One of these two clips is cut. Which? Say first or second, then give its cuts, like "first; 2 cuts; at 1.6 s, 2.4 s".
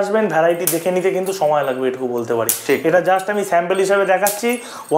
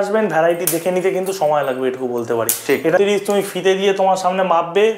second; 1 cut; at 3.0 s